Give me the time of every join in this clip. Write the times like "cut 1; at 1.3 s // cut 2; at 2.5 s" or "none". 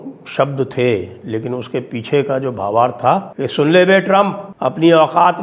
cut 1; at 3.4 s // cut 2; at 4.4 s